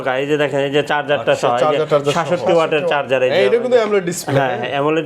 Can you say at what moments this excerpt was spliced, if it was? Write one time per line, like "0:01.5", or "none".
none